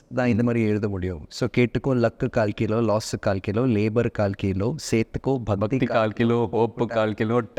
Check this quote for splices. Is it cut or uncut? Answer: uncut